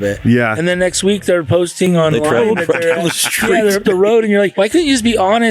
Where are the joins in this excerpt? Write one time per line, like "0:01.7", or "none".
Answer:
0:04.5